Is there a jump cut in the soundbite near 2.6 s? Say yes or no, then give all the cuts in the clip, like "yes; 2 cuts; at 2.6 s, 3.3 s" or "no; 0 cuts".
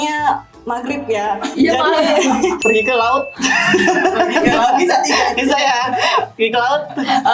yes; 1 cut; at 2.6 s